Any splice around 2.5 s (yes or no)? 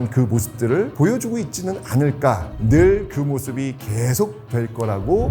yes